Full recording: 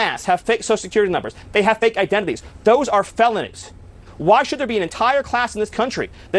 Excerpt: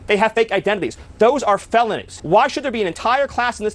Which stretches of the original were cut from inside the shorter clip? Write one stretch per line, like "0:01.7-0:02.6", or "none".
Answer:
0:03.5-0:04.0

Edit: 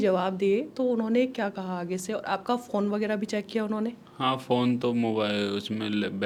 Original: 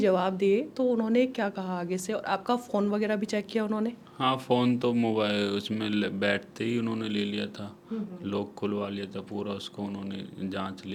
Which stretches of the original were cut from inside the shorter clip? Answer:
none

